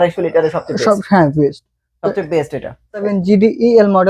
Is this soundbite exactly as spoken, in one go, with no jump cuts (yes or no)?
no